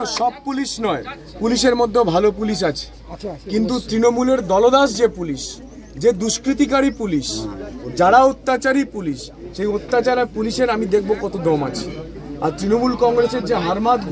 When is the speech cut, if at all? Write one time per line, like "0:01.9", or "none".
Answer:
none